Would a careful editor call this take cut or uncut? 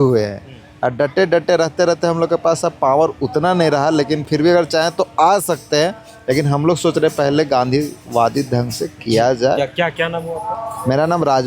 uncut